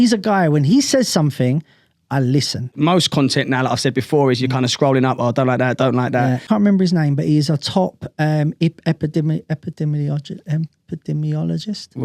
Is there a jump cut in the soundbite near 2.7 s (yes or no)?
yes